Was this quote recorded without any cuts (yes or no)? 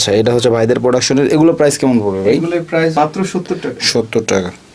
no